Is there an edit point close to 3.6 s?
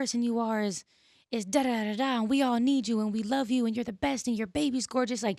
no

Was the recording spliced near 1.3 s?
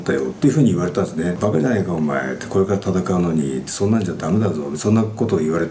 yes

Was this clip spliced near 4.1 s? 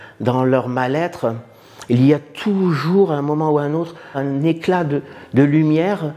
yes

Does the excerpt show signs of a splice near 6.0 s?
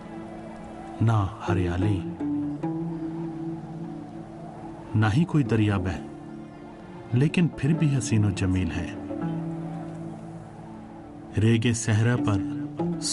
yes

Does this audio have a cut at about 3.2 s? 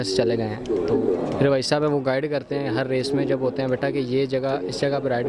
no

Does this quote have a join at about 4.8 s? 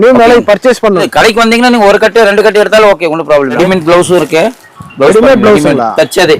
no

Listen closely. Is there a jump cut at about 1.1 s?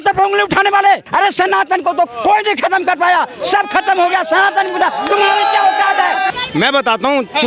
yes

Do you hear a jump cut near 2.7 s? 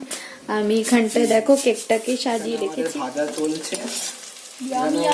yes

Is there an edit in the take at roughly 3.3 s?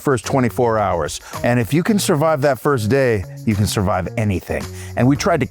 no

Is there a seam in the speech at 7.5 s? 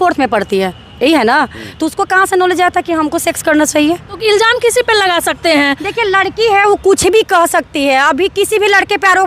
no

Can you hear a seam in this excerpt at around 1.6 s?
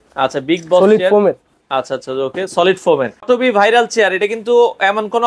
no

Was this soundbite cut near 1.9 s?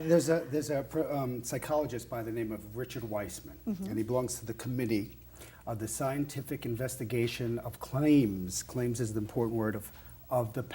yes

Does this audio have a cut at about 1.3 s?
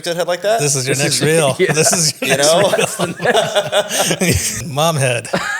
no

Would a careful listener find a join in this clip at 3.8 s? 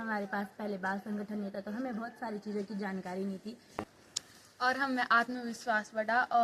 yes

